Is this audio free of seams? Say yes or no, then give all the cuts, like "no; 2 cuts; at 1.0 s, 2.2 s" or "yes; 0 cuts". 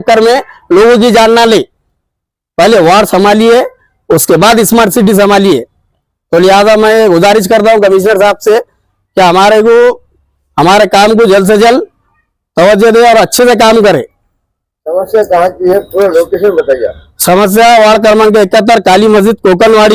yes; 0 cuts